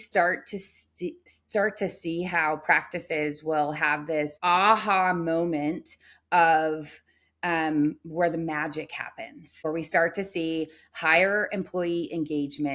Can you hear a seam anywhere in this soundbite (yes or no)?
yes